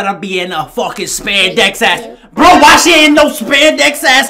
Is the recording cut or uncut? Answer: uncut